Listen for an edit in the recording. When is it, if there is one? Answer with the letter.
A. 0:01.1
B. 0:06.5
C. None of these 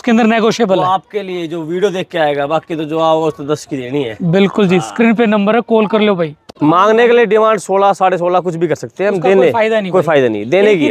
B